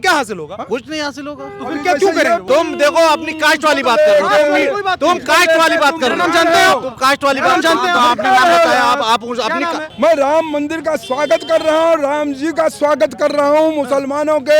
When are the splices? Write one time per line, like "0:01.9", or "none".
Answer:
0:02.4
0:09.8